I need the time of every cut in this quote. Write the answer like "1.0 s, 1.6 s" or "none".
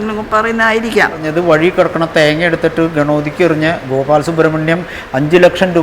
1.2 s